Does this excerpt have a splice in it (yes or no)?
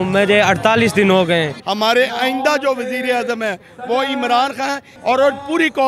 yes